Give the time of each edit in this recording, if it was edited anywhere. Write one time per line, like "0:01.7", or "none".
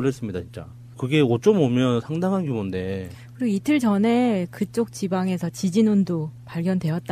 0:02.4